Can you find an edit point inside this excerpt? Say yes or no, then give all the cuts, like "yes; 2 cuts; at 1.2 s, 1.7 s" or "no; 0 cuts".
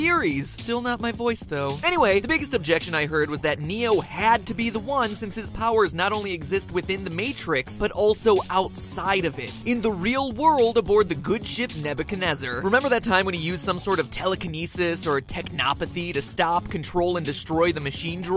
no; 0 cuts